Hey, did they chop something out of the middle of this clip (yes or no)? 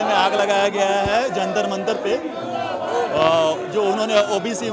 no